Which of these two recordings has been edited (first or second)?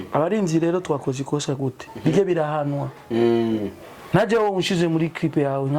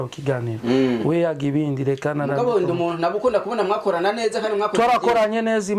first